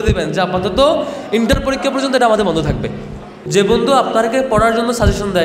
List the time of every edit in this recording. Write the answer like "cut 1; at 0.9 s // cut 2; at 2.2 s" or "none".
cut 1; at 3.4 s